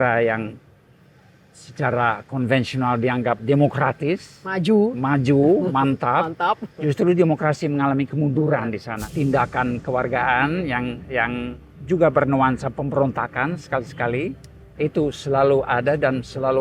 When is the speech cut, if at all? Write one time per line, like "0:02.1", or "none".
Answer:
0:08.9

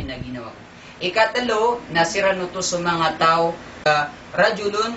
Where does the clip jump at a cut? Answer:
0:03.9

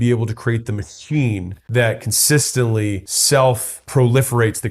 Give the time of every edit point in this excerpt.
0:01.6
0:03.1
0:03.7

